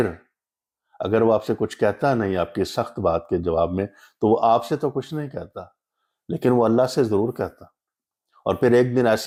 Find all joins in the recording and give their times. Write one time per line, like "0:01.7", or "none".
none